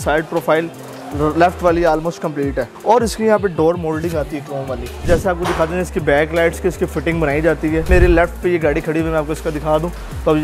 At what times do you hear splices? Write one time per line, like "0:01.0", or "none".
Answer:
0:02.7
0:05.0
0:07.9